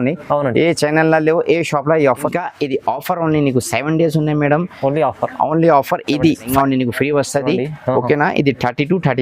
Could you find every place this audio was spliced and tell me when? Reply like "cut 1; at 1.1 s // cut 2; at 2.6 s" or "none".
cut 1; at 2.2 s // cut 2; at 6.5 s